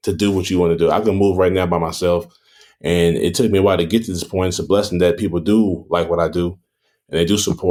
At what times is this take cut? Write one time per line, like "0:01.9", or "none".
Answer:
none